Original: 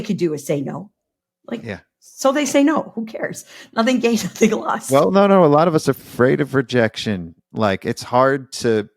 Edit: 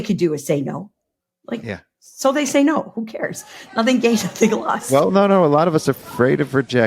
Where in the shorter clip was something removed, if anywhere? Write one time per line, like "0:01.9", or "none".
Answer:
none